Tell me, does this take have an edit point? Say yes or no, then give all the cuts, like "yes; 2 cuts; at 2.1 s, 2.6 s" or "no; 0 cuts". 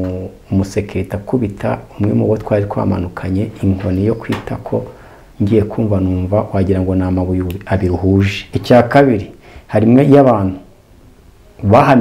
yes; 1 cut; at 8.5 s